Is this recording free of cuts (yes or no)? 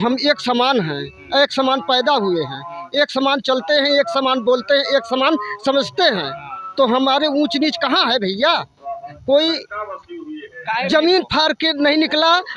no